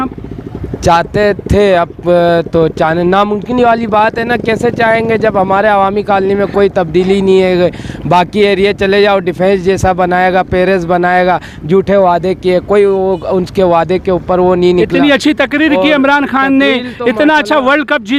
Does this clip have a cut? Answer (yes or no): no